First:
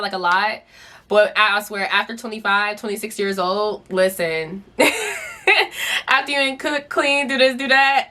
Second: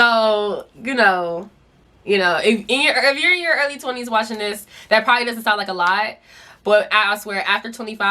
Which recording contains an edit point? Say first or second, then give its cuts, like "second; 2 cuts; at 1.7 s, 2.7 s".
second; 1 cut; at 1.9 s